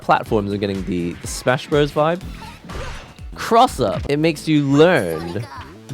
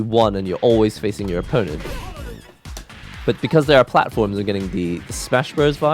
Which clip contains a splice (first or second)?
first